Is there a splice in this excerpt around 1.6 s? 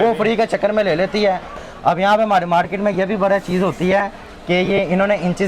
yes; 1 cut; at 1.6 s

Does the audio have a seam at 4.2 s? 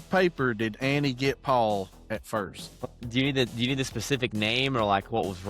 no; 1 cut; at 2.8 s

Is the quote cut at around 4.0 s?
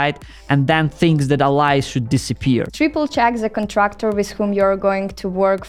no; 1 cut; at 2.7 s

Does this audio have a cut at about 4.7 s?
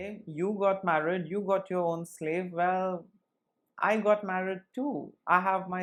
no; 0 cuts

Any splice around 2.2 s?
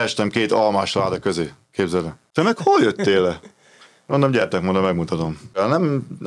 yes; 2 cuts; at 2.2 s, 5.5 s

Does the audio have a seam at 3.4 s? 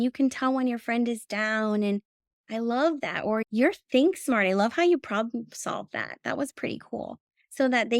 yes; 1 cut; at 3.4 s

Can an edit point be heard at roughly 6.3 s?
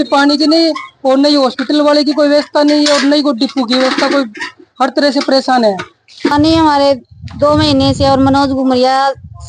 yes; 1 cut; at 6.3 s

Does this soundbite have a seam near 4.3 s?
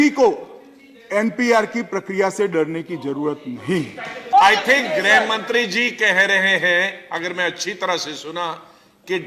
yes; 1 cut; at 4.3 s

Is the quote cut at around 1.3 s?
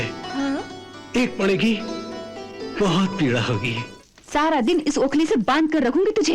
no; 1 cut; at 3.9 s

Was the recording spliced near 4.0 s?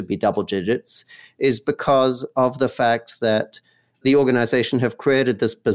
yes; 1 cut; at 4.0 s

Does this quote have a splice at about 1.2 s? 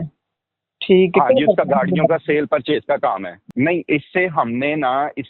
no; 1 cut; at 3.3 s

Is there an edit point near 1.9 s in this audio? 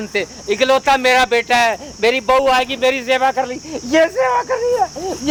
no; 0 cuts

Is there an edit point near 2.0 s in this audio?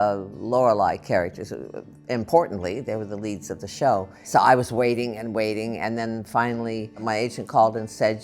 no; 2 cuts; at 4.2 s, 7.0 s

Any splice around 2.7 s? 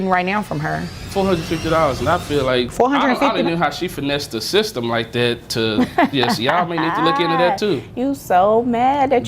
yes; 2 cuts; at 0.9 s, 2.7 s

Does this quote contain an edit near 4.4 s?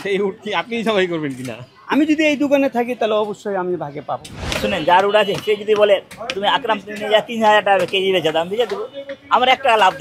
yes; 1 cut; at 4.4 s

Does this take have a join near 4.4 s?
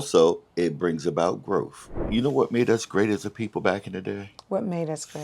no; 1 cut; at 2.0 s

